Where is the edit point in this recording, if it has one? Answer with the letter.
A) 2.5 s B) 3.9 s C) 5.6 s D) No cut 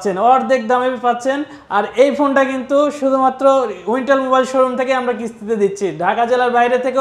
D